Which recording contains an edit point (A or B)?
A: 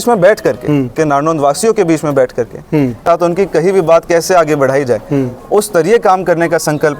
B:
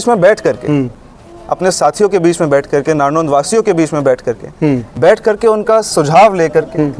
A